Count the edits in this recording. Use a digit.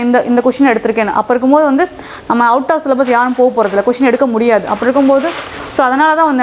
0